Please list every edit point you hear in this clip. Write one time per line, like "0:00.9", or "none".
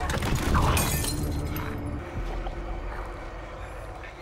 0:02.0

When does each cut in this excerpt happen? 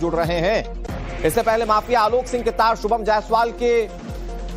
0:01.4

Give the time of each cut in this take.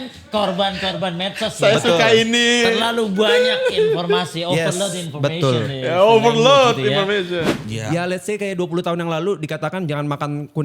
0:07.5

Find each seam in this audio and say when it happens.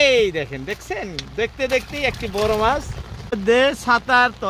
0:03.4

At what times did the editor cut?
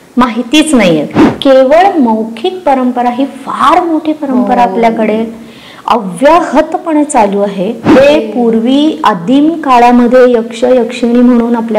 0:01.2
0:07.9

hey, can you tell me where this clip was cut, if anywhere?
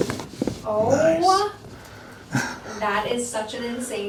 none

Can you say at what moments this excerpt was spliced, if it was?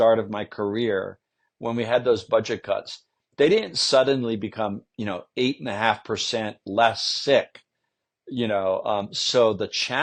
none

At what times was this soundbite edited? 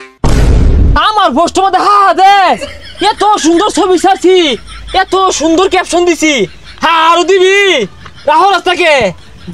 0:00.9

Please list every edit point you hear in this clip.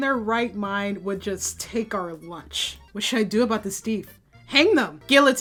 none

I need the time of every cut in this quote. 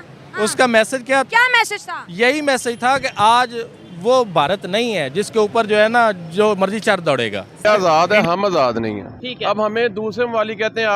0:07.6
0:09.2

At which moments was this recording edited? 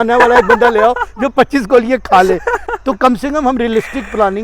none

